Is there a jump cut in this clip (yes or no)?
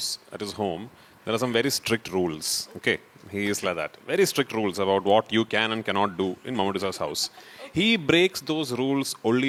no